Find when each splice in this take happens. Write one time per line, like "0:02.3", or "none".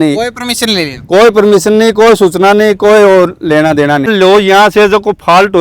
0:04.1